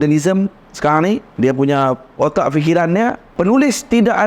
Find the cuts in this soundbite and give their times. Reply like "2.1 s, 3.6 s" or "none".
1.3 s, 3.2 s